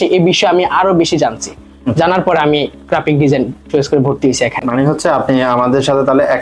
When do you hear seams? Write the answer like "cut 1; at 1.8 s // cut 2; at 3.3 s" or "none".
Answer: none